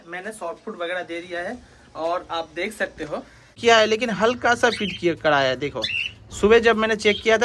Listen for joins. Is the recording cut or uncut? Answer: cut